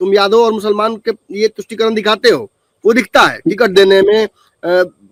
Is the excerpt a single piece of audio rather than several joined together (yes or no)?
yes